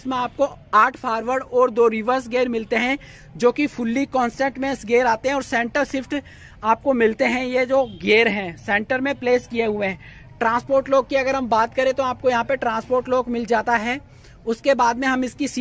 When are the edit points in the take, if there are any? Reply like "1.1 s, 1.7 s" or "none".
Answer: none